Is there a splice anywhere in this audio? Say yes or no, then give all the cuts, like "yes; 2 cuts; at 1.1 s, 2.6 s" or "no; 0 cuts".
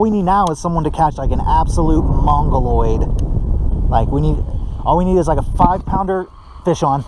no; 0 cuts